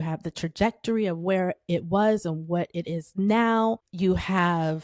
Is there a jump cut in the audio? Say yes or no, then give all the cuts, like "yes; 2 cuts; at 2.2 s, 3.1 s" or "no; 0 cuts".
yes; 1 cut; at 3.9 s